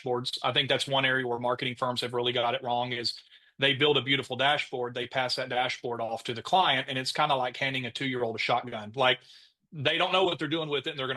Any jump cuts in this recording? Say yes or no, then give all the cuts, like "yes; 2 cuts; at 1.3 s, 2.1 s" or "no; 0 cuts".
no; 0 cuts